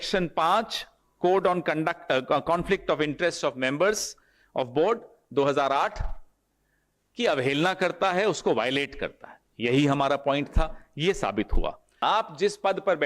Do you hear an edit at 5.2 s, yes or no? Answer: no